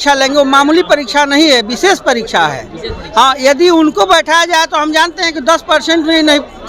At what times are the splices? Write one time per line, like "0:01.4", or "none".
none